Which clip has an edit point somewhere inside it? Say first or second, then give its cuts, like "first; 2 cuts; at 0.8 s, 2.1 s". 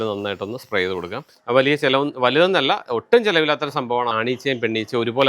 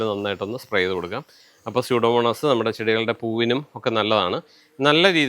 first; 2 cuts; at 1.3 s, 4.1 s